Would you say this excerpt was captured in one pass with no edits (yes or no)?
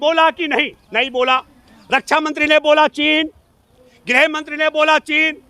yes